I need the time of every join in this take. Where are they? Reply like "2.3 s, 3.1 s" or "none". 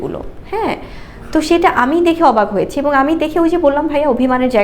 none